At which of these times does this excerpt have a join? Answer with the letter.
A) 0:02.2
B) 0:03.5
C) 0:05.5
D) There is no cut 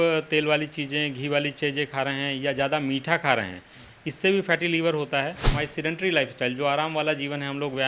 C